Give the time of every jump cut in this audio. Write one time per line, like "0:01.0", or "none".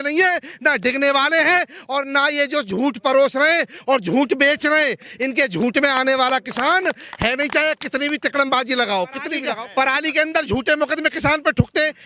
0:09.4